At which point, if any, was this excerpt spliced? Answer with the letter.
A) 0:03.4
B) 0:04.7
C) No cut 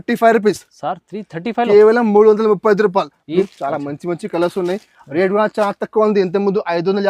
A